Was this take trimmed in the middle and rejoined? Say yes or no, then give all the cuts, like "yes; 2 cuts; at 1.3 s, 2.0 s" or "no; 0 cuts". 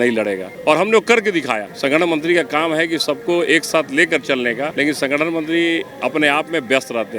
yes; 1 cut; at 1.6 s